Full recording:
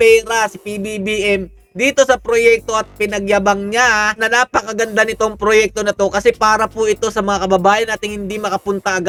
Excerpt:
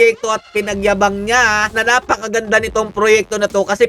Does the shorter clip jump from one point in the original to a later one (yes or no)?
no